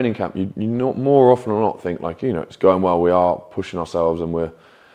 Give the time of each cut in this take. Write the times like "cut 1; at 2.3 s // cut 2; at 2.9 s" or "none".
none